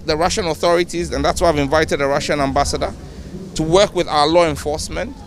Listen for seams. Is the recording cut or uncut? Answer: uncut